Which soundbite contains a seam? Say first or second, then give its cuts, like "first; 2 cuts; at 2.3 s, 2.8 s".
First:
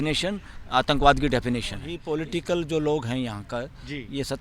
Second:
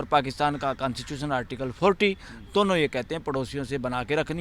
first; 1 cut; at 1.9 s